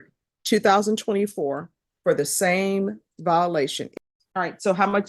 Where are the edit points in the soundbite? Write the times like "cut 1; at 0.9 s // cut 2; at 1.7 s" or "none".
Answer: cut 1; at 3.8 s